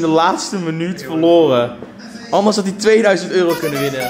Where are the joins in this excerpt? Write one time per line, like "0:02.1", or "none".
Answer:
none